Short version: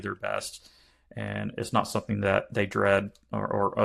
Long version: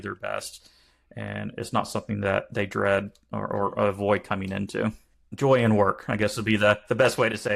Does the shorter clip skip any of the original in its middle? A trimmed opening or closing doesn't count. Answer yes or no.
no